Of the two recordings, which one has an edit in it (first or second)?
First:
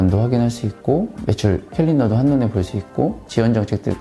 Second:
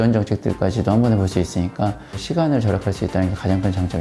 second